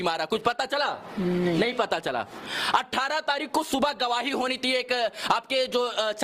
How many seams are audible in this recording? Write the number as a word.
zero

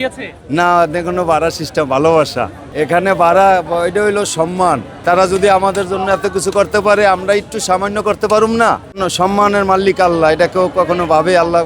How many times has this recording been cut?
three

